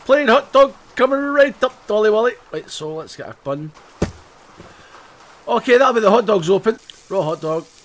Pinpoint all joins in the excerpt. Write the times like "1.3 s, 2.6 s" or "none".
3.8 s, 6.8 s

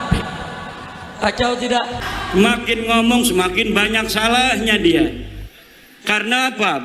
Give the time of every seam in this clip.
2.0 s

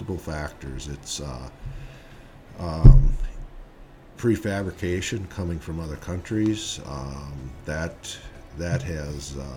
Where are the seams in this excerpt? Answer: none

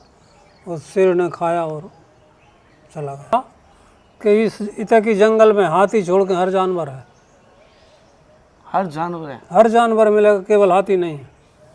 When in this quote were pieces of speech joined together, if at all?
3.3 s

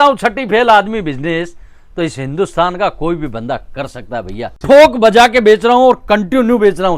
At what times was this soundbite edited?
4.6 s

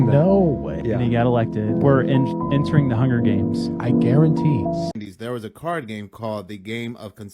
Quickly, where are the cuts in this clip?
4.9 s

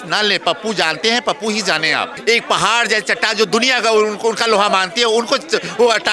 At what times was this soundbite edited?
2.1 s

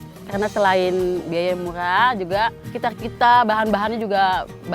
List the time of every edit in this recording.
2.7 s

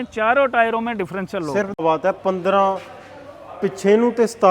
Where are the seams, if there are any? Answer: 1.8 s

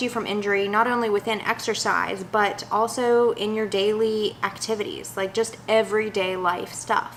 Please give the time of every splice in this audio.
none

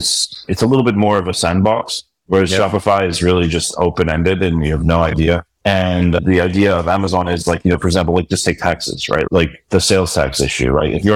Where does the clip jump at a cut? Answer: none

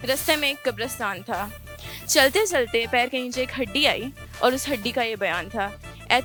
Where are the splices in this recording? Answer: none

